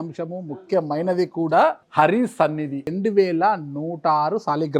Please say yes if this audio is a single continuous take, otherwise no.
no